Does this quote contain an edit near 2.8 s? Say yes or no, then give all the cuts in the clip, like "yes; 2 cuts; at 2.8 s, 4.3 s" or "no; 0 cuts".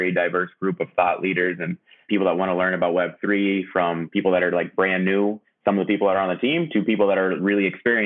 no; 1 cut; at 5.4 s